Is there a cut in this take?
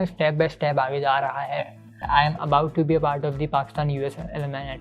yes; 1 cut; at 2.0 s

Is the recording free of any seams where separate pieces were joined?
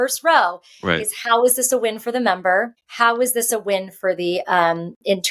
no; 1 cut; at 2.8 s

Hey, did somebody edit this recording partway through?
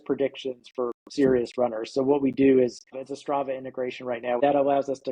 yes; 2 cuts; at 3.1 s, 4.4 s

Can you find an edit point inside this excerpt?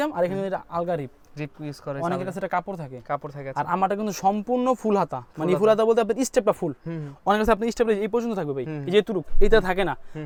no; 0 cuts

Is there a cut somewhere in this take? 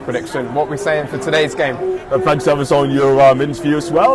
no; 0 cuts

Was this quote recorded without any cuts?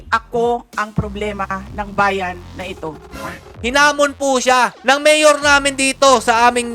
no; 1 cut; at 3.6 s

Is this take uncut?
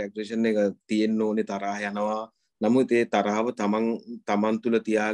yes; 0 cuts

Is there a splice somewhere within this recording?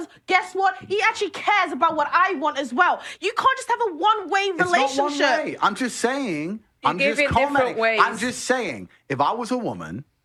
no; 0 cuts

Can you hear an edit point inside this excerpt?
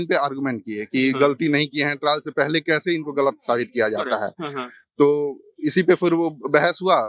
no; 0 cuts

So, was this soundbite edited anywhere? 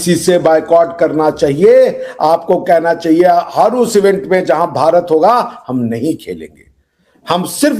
no; 0 cuts

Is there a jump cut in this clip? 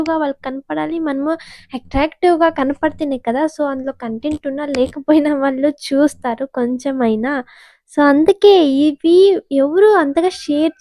no; 0 cuts

